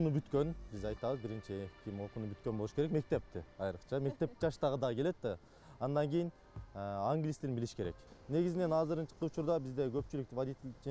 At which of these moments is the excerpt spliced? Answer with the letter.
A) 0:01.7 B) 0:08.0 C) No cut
B